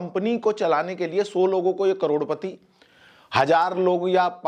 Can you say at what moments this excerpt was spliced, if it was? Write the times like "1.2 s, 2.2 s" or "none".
none